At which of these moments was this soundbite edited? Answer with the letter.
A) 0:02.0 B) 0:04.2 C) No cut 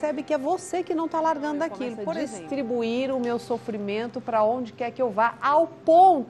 A